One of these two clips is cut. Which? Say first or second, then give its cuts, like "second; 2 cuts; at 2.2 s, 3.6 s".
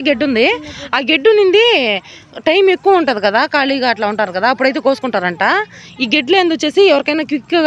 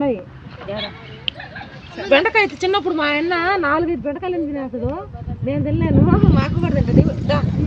second; 1 cut; at 2.0 s